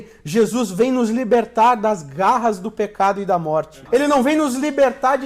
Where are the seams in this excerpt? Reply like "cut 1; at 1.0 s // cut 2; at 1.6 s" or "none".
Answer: cut 1; at 3.8 s

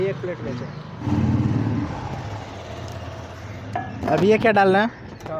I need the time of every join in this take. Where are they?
cut 1; at 1.1 s

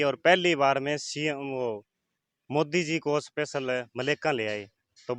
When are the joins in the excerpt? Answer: none

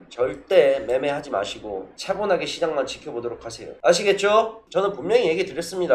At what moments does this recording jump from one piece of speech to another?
none

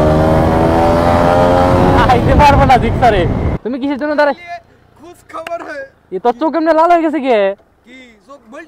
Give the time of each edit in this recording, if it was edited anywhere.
cut 1; at 3.5 s

